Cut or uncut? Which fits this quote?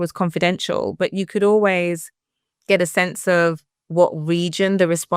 uncut